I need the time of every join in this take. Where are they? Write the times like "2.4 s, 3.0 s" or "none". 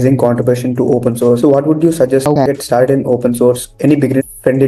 none

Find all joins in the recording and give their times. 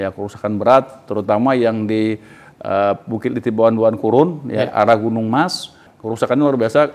5.8 s

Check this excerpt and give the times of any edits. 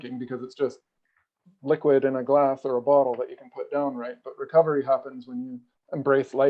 none

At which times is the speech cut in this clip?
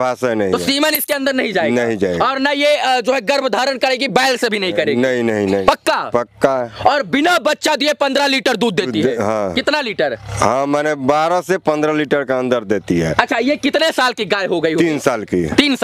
none

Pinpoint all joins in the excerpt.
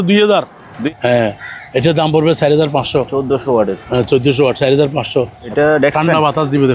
0.9 s, 5.4 s

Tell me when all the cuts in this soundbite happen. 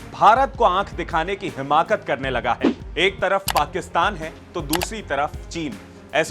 2.7 s

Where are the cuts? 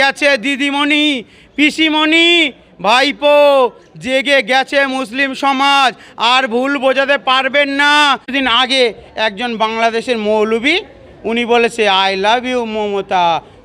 8.3 s

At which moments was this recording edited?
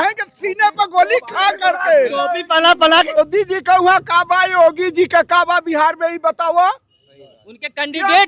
3.2 s

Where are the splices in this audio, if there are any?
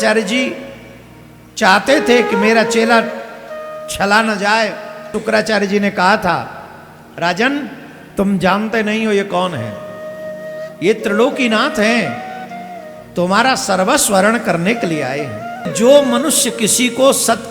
5.2 s, 15.7 s

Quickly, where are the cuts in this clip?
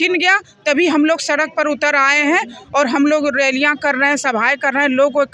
none

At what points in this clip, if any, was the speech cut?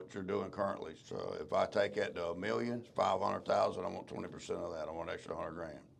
0.9 s, 2.9 s

